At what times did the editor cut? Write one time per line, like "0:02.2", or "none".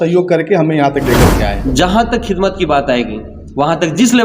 0:01.6